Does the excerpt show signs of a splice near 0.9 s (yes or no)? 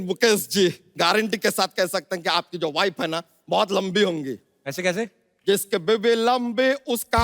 yes